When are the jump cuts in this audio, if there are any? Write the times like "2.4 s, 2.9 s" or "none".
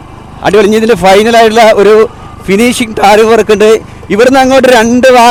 none